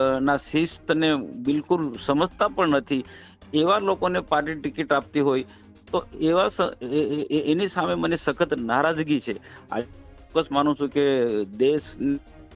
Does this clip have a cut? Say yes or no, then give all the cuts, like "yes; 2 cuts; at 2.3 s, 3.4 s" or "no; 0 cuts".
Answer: no; 0 cuts